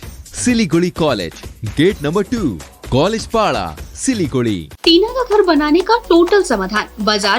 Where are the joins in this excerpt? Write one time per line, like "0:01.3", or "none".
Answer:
0:04.7